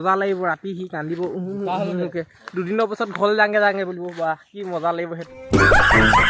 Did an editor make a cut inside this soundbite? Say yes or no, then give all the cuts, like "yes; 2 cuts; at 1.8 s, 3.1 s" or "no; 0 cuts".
yes; 1 cut; at 5.2 s